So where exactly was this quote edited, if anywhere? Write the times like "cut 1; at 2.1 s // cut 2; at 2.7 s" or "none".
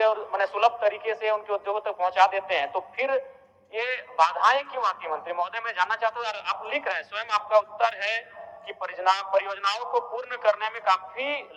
none